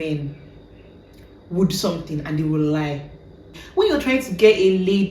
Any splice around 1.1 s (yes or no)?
no